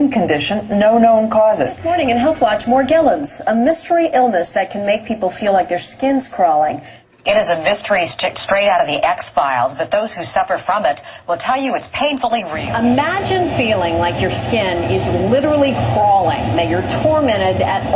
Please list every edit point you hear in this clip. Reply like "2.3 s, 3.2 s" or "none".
5.4 s